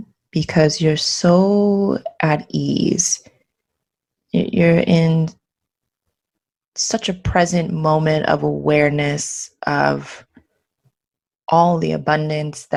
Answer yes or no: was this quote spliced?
no